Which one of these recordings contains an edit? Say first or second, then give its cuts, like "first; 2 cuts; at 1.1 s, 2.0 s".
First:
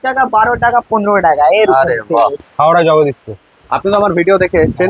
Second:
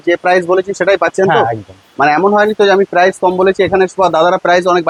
first; 1 cut; at 2.4 s